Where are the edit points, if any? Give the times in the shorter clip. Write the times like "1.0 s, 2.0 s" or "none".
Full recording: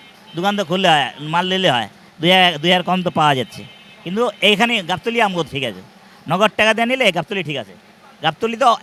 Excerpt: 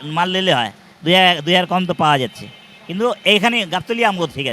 none